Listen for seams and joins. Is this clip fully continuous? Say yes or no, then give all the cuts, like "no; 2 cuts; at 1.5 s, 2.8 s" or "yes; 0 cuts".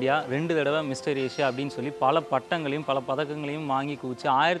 yes; 0 cuts